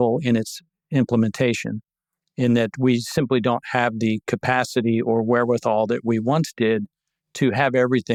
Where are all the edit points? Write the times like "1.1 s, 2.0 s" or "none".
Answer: none